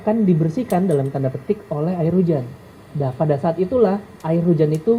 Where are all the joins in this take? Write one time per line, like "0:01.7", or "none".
none